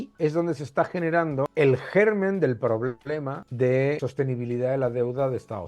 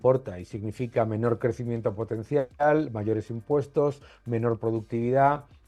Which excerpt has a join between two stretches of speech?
first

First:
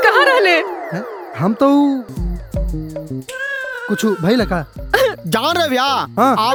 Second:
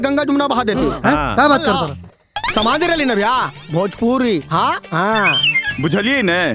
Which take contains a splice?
second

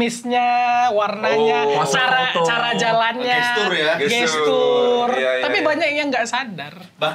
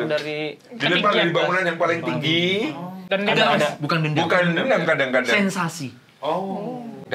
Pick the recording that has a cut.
second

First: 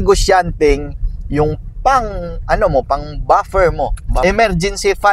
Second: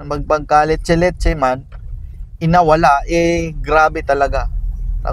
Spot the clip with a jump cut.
first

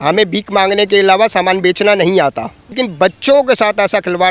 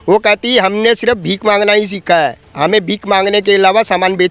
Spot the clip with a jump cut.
first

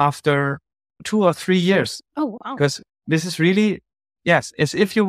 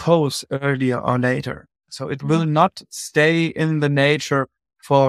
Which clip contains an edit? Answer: first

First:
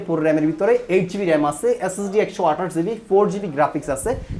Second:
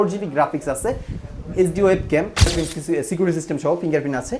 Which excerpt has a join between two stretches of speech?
second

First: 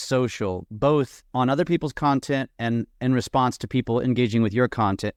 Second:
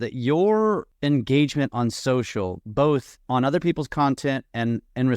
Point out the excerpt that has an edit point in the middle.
second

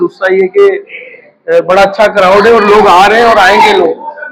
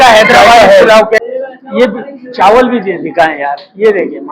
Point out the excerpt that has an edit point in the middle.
second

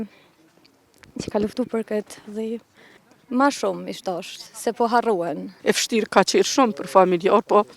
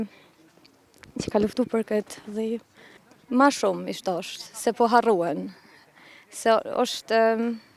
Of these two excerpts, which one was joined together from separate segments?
first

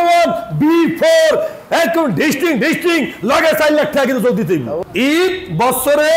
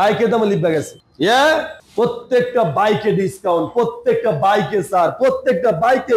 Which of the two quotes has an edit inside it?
first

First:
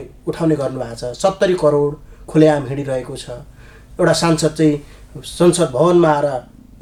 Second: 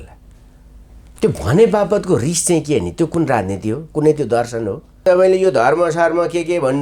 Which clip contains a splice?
second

